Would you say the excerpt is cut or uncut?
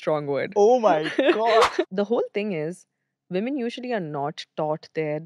cut